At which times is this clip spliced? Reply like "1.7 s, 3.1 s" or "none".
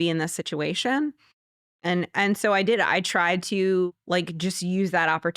3.9 s